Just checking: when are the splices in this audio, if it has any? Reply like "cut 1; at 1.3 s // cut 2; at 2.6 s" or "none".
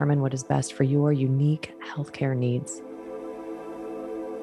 cut 1; at 2.7 s